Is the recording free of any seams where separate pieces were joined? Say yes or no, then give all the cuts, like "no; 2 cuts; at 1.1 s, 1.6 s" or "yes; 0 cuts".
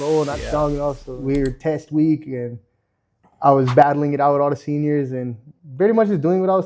no; 1 cut; at 1.1 s